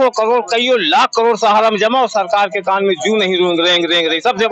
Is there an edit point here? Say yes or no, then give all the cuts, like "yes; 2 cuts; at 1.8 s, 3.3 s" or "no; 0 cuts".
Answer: no; 0 cuts